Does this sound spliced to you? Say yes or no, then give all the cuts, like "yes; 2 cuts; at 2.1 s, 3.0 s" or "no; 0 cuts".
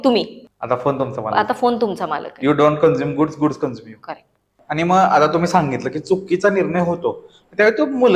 yes; 1 cut; at 4.5 s